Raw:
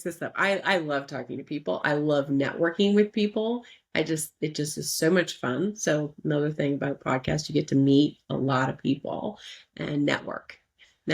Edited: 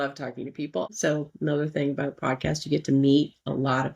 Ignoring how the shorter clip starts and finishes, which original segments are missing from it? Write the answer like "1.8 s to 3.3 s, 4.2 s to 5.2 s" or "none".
1.8 s to 5.7 s